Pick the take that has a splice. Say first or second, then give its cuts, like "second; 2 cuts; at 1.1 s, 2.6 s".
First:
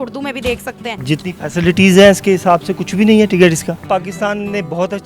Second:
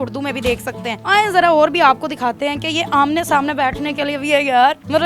first; 2 cuts; at 0.9 s, 3.8 s